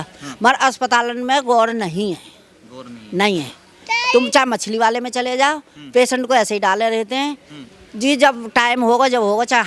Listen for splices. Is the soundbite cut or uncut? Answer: uncut